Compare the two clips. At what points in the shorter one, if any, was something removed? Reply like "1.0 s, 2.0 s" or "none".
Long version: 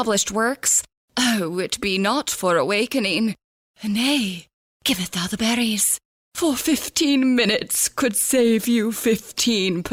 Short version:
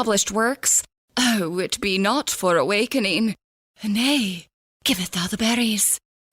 none